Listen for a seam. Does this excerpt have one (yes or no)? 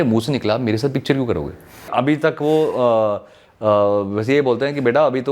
yes